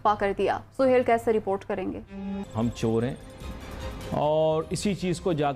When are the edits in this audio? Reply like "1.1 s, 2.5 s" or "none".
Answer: 2.4 s